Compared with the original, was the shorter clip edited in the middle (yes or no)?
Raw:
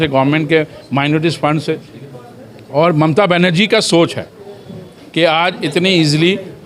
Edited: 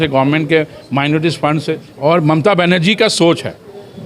yes